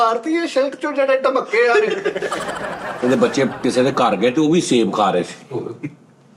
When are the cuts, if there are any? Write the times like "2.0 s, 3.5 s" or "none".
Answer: 2.7 s